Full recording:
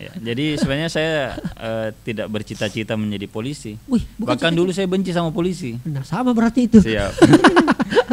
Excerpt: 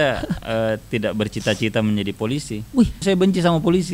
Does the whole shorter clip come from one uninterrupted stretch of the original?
no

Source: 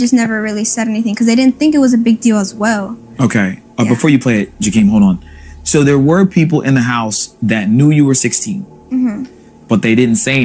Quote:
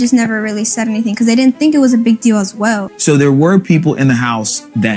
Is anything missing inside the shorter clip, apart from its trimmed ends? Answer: yes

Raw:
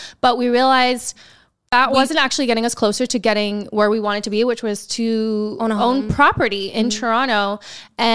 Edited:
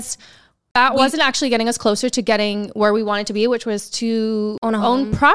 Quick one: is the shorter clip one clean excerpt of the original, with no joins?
yes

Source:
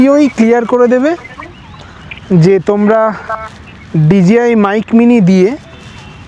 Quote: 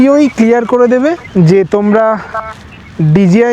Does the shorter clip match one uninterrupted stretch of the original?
no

